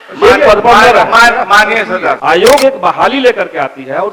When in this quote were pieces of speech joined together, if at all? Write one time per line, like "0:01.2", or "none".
0:02.2